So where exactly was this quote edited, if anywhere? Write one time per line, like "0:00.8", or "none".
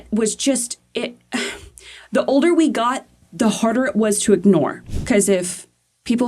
0:04.9